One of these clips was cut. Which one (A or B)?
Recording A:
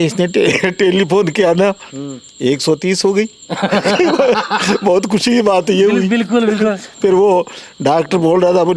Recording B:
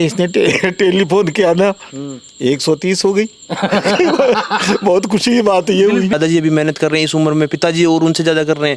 B